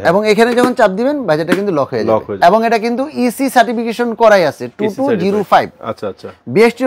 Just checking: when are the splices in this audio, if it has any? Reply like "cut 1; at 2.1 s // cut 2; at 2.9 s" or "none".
cut 1; at 2.3 s

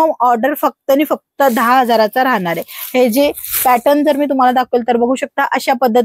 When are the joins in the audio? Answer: none

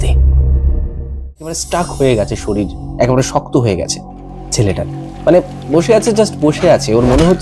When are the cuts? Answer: cut 1; at 1.5 s

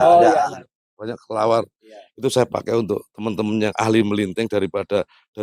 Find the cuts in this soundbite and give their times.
none

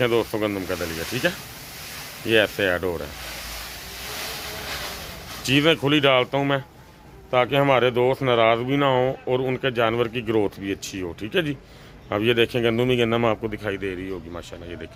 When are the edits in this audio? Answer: none

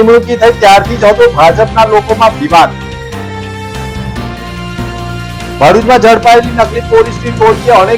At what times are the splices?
none

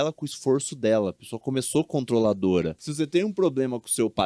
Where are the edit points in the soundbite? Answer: cut 1; at 2.8 s

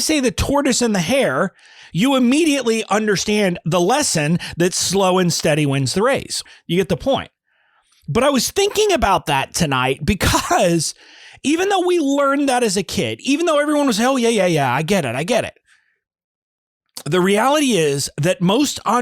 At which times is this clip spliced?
cut 1; at 6.4 s

